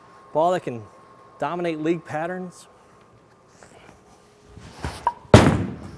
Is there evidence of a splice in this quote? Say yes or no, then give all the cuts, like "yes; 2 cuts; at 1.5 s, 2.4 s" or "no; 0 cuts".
yes; 1 cut; at 4.5 s